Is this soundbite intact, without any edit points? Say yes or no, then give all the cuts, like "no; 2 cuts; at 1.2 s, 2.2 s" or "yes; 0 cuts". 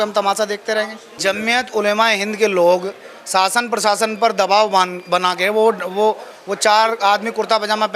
no; 1 cut; at 1.1 s